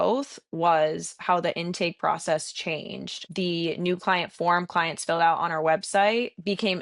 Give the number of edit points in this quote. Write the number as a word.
one